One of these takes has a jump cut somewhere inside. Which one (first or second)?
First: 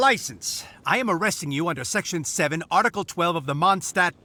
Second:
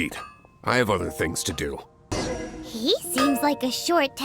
second